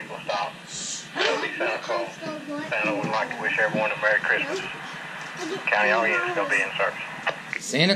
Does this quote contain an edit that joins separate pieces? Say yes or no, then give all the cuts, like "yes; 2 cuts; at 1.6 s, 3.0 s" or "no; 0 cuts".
no; 0 cuts